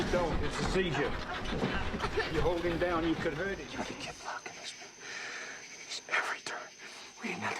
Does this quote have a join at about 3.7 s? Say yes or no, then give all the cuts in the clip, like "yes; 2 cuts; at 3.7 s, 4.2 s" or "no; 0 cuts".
yes; 1 cut; at 3.7 s